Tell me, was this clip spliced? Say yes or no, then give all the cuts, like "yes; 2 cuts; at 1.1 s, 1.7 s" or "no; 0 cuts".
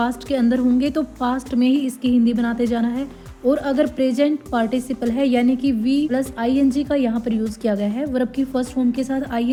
no; 0 cuts